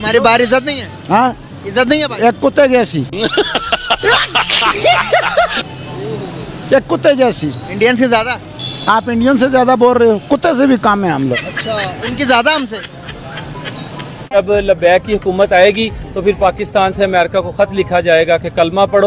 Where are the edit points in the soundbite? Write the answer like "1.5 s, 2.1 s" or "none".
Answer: 11.4 s, 14.4 s